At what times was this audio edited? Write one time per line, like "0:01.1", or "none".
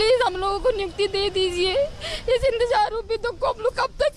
0:01.9